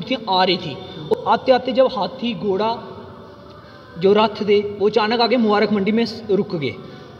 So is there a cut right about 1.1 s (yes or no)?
yes